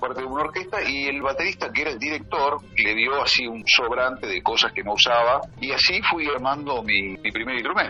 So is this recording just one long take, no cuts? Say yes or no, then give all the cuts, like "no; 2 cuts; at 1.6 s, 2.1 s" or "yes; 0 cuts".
yes; 0 cuts